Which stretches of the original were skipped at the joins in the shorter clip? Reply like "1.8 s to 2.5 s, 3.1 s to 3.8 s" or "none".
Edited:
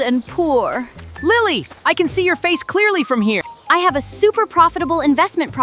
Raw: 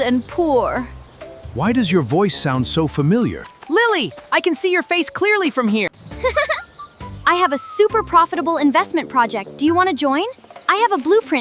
1.0 s to 3.5 s, 6.0 s to 7.1 s